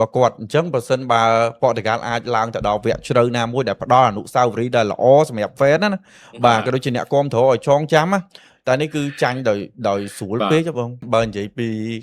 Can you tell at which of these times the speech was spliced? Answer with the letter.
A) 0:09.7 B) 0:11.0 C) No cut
B